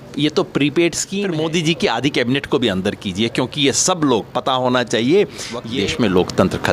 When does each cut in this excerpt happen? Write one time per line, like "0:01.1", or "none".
0:01.1
0:05.7